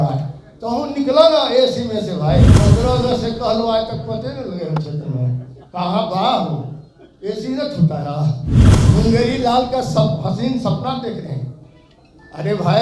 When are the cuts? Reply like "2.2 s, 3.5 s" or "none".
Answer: 2.6 s, 8.7 s